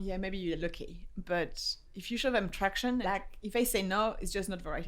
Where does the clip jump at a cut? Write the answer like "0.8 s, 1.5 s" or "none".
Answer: 3.0 s